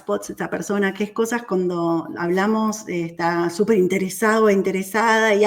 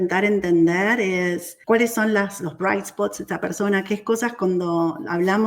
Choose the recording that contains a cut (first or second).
second